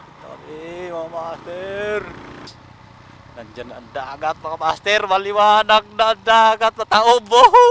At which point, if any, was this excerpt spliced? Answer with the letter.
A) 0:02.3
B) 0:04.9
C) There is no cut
A